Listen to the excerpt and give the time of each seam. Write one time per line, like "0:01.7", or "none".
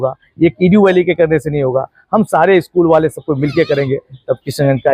none